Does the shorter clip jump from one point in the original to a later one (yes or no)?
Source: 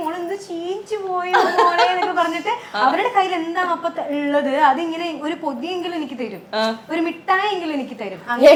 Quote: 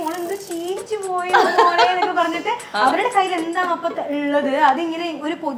no